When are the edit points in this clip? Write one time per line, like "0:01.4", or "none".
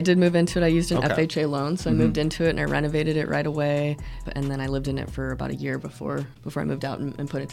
0:04.3
0:06.3